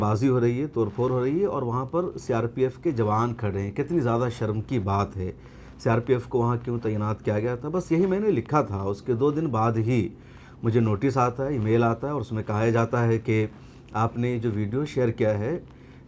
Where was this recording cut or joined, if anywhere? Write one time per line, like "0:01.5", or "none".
none